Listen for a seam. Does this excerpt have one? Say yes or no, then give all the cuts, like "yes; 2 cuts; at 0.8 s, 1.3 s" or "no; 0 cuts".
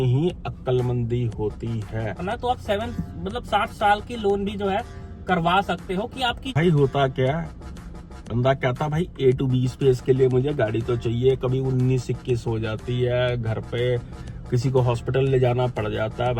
yes; 2 cuts; at 2.2 s, 6.5 s